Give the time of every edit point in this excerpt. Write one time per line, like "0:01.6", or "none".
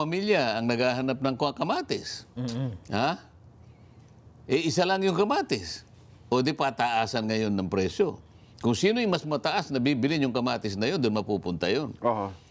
none